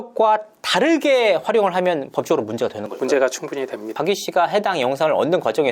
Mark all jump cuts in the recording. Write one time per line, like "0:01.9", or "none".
0:04.0